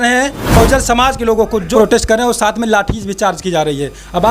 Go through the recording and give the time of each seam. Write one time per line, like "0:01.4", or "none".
0:01.7